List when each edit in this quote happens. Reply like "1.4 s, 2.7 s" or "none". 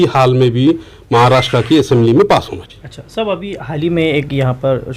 none